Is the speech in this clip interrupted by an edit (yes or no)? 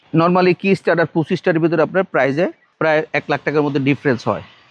yes